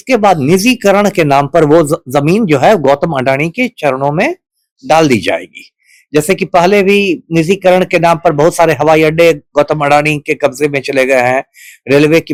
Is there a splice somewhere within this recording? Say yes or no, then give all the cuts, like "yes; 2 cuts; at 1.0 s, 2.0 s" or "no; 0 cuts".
no; 0 cuts